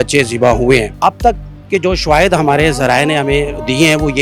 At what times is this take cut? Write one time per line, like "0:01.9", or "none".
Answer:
0:00.9